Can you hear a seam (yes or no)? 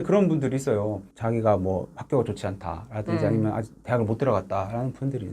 yes